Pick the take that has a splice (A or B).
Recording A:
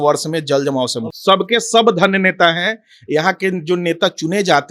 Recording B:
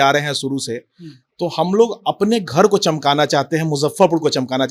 A